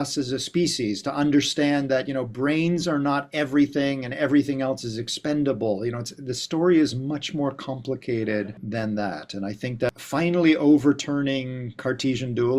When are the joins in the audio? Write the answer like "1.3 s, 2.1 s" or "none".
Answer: 8.6 s, 9.9 s